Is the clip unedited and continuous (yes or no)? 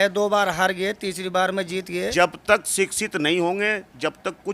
no